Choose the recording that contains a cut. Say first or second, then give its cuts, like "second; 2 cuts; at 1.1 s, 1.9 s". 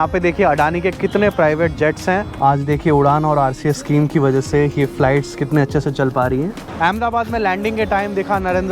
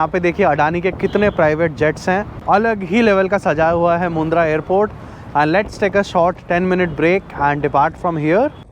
first; 2 cuts; at 2.3 s, 6.6 s